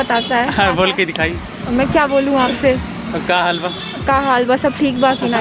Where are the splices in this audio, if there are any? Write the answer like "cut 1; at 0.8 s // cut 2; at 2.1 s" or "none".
none